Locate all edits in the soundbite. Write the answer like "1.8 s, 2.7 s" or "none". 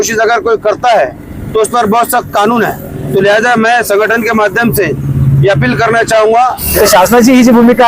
6.6 s